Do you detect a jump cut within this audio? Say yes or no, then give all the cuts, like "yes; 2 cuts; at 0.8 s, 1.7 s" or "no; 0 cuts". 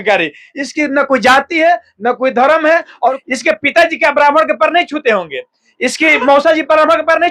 yes; 1 cut; at 3.2 s